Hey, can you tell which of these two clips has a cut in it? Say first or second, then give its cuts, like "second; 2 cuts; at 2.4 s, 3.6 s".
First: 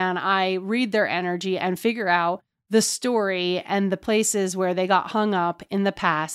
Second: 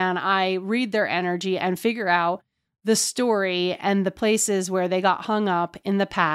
first; 1 cut; at 2.5 s